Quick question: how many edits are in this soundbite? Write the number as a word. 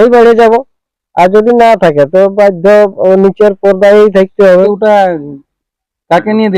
one